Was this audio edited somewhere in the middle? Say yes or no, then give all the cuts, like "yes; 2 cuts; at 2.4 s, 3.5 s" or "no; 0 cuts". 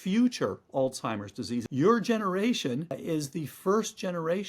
yes; 2 cuts; at 1.6 s, 3.0 s